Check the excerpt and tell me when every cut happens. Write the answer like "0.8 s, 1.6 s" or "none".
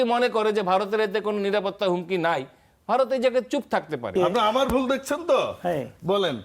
4.1 s